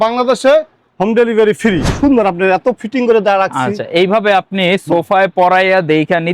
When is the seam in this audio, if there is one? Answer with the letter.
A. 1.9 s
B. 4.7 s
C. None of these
A